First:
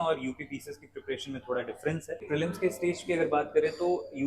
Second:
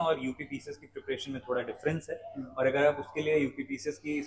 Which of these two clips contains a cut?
first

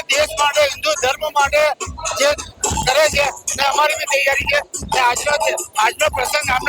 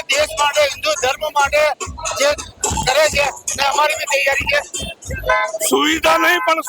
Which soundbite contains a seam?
second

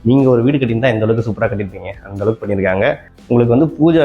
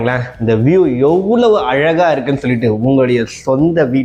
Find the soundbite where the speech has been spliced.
first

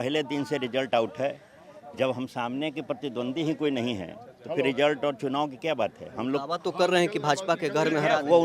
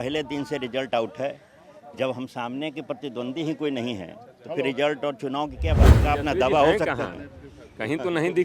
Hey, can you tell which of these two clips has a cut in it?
second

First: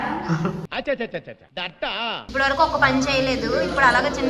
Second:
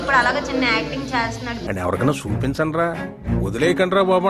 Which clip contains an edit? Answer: first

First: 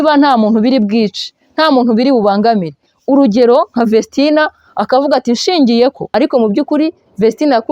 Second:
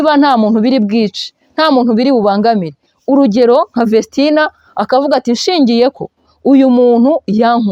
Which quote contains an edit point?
first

